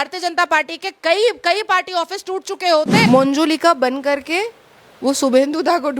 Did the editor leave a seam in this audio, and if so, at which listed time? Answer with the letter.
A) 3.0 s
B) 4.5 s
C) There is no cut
A